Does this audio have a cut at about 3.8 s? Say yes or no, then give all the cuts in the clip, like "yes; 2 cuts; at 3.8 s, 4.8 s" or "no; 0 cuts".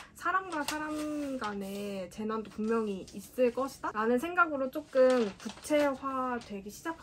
no; 0 cuts